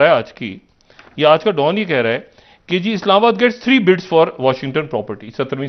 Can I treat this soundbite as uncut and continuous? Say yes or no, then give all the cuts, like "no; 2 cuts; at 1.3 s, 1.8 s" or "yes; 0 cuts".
yes; 0 cuts